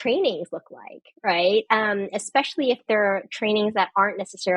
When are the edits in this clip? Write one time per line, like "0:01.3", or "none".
none